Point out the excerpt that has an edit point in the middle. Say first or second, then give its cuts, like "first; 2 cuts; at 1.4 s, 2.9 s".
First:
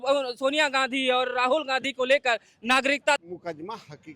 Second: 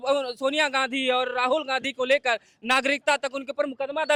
first; 1 cut; at 3.2 s